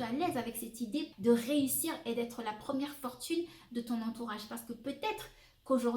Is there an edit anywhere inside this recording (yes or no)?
yes